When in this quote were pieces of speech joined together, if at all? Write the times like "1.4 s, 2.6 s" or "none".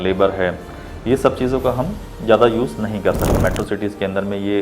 3.4 s